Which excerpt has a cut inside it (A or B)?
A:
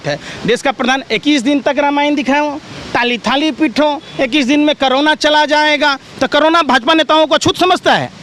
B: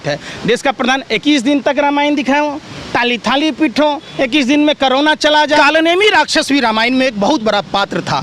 B